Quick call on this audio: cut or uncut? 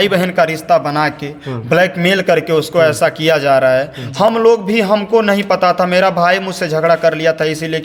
uncut